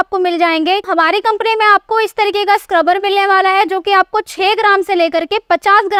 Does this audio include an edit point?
no; 0 cuts

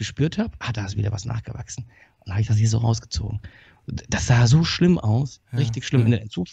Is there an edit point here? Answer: no; 0 cuts

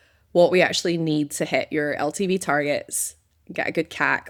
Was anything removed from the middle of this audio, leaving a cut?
no; 0 cuts

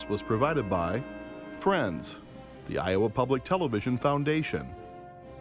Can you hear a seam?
no; 0 cuts

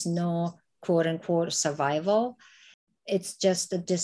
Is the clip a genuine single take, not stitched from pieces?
yes; 0 cuts

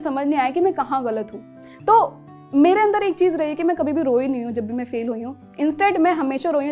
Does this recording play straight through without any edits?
yes; 0 cuts

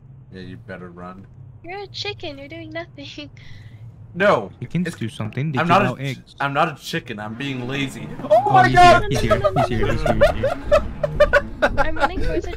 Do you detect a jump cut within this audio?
no; 0 cuts

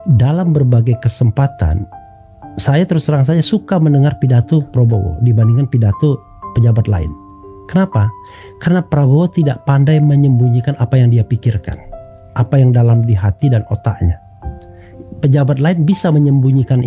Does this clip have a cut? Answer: no; 0 cuts

